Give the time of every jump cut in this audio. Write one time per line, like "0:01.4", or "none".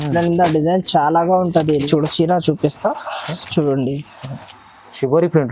0:01.9